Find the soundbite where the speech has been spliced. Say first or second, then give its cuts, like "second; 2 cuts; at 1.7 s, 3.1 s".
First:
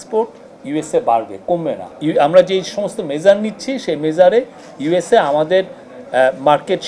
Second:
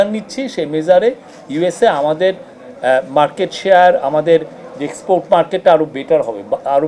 first; 1 cut; at 1.9 s